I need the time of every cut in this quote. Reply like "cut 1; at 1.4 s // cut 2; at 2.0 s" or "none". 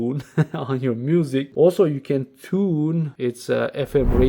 cut 1; at 1.5 s // cut 2; at 3.1 s